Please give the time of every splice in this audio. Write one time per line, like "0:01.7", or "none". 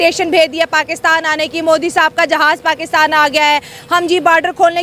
none